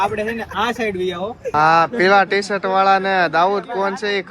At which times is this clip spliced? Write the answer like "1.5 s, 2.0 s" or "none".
1.5 s